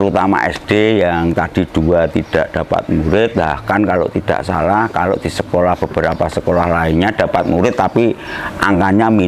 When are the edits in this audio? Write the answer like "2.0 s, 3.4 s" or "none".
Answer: none